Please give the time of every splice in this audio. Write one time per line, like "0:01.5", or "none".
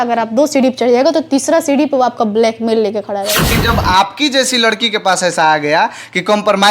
0:03.5